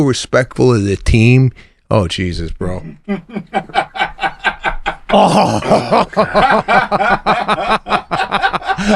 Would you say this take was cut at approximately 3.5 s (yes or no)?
no